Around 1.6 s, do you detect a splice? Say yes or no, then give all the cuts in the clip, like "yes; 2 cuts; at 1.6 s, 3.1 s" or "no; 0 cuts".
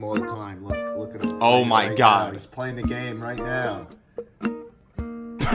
no; 0 cuts